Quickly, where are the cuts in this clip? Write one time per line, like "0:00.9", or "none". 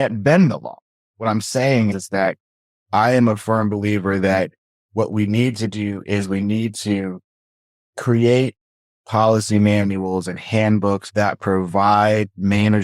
0:00.9
0:11.0